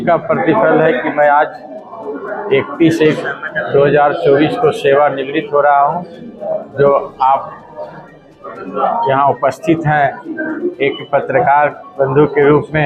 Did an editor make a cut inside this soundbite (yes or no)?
no